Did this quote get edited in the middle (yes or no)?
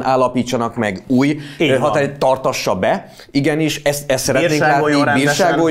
no